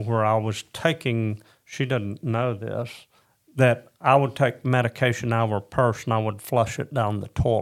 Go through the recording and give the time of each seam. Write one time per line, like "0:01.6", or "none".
none